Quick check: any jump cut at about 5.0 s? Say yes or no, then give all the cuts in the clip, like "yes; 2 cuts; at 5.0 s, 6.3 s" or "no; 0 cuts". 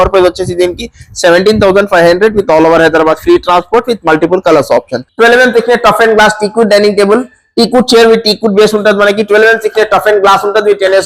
yes; 1 cut; at 5.0 s